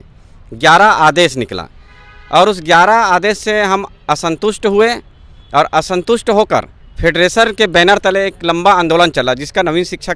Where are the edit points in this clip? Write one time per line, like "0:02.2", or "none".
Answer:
none